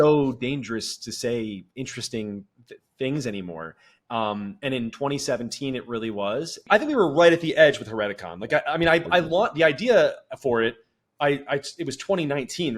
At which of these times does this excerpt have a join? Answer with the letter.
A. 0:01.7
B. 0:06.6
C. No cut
B